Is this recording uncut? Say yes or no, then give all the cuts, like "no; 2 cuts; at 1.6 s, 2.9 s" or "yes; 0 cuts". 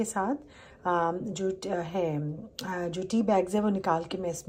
yes; 0 cuts